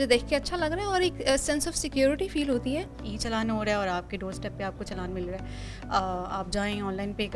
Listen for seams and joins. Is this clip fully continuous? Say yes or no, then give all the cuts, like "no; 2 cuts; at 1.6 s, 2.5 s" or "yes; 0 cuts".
no; 1 cut; at 3.1 s